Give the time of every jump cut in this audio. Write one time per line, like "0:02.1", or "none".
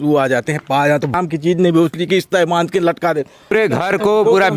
0:01.1
0:03.5